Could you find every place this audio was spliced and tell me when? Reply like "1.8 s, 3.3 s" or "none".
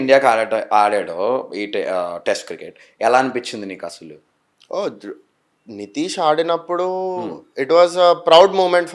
none